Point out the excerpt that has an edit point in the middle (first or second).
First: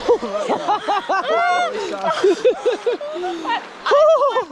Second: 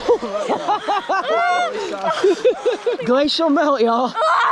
second